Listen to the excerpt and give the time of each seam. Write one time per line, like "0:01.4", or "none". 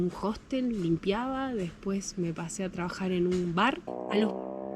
0:03.8